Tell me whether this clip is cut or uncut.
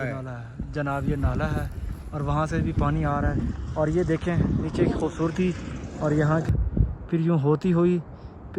cut